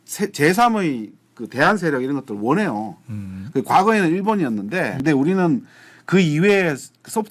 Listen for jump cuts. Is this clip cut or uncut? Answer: cut